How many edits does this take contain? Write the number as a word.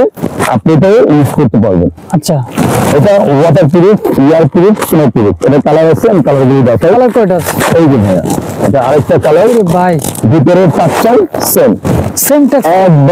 zero